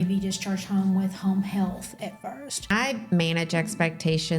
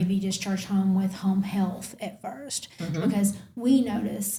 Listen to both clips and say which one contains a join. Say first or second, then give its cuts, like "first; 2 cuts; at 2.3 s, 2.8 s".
first; 1 cut; at 2.7 s